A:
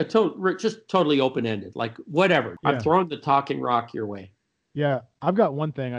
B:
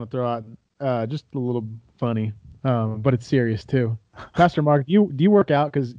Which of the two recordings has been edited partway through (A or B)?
A